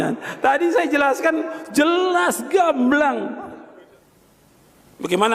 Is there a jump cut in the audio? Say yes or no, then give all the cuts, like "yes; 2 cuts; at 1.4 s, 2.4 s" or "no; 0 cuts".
yes; 1 cut; at 3.7 s